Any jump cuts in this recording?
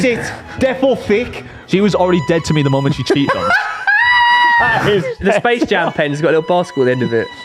yes; 2 cuts; at 1.6 s, 5.2 s

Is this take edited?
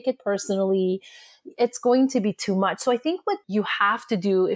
yes; 1 cut; at 3.4 s

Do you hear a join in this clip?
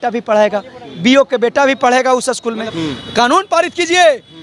yes; 1 cut; at 2.7 s

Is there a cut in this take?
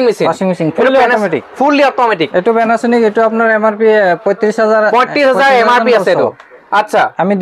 no; 0 cuts

